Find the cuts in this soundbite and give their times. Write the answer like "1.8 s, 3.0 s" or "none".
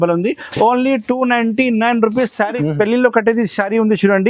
2.5 s